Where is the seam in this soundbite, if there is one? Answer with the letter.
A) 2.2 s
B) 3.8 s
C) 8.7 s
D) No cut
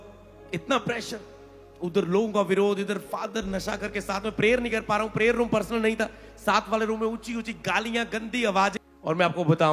C